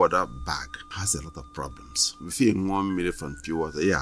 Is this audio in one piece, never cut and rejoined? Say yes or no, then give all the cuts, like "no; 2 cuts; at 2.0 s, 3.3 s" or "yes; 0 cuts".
no; 2 cuts; at 0.9 s, 2.2 s